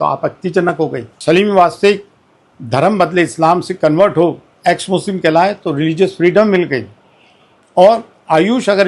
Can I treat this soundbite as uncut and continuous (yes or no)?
no